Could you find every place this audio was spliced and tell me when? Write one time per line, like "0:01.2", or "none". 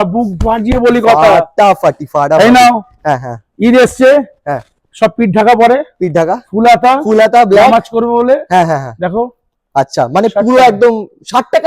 none